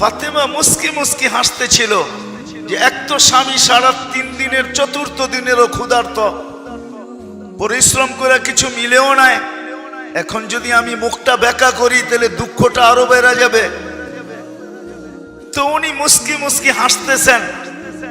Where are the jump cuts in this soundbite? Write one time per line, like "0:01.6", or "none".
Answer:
0:13.9
0:15.5